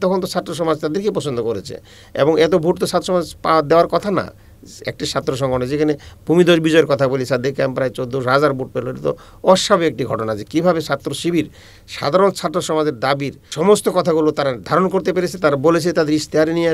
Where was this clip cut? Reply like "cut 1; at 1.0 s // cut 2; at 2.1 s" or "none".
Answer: cut 1; at 13.5 s